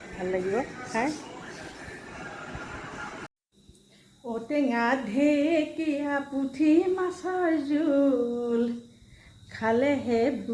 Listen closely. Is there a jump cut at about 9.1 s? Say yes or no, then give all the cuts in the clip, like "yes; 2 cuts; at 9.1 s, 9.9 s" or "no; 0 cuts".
no; 1 cut; at 3.4 s